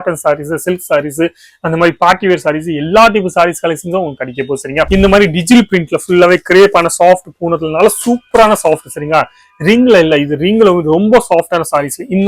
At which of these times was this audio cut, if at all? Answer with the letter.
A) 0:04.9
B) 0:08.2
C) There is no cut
A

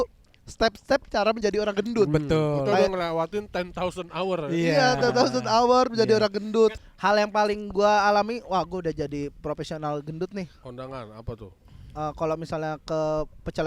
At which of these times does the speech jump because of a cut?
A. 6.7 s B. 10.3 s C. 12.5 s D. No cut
A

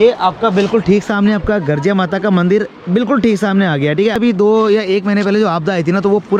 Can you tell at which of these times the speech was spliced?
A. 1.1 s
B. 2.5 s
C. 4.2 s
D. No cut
C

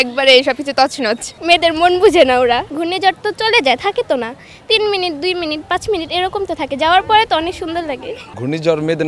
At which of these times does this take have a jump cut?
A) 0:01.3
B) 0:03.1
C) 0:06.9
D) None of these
A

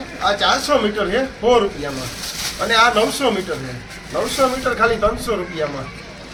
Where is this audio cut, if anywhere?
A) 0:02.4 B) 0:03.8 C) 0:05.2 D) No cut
D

